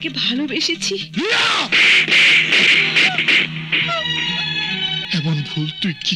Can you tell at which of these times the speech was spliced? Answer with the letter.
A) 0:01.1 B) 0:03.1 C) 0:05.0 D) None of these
C